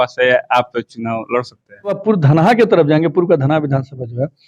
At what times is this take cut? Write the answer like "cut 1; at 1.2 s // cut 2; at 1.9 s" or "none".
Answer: cut 1; at 2.0 s